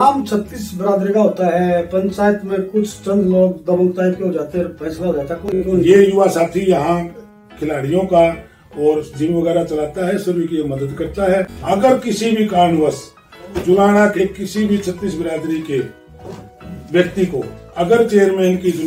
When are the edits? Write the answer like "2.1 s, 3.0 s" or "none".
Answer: 5.6 s, 11.6 s